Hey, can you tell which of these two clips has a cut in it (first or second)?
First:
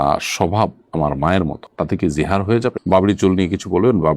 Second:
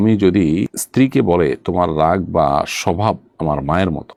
first